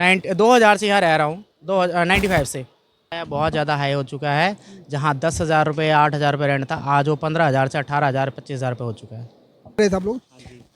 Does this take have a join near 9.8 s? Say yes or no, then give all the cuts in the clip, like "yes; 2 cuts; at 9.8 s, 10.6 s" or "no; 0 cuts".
yes; 2 cuts; at 3.2 s, 9.8 s